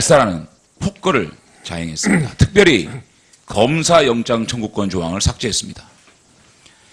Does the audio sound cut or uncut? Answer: cut